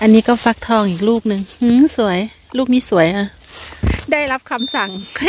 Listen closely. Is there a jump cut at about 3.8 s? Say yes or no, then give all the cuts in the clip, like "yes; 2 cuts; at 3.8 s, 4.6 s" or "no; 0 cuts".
yes; 1 cut; at 3.8 s